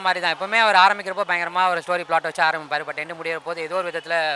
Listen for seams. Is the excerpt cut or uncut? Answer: uncut